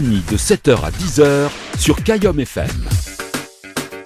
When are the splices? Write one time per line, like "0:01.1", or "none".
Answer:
0:03.0